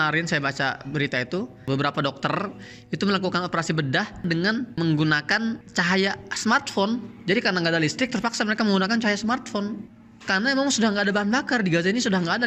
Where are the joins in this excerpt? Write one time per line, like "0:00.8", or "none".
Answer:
none